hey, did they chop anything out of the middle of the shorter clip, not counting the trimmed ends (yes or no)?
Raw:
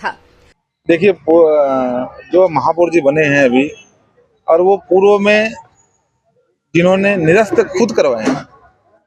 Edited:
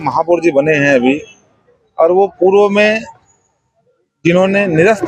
no